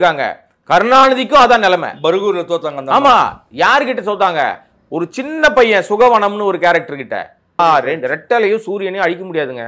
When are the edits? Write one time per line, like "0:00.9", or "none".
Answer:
0:07.6